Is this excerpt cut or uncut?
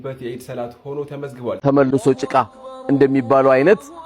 cut